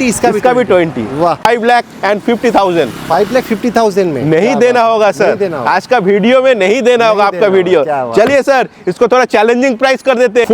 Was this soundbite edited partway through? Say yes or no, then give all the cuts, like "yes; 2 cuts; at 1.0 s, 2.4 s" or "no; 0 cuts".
yes; 1 cut; at 1.4 s